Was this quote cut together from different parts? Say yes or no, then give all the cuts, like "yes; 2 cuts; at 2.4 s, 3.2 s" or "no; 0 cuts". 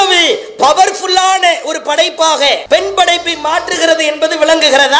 yes; 1 cut; at 2.6 s